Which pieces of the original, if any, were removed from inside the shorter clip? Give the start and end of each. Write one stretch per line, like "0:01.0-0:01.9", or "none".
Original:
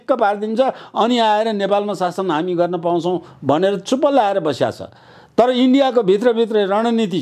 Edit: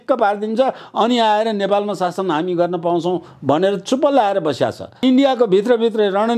0:05.0-0:05.5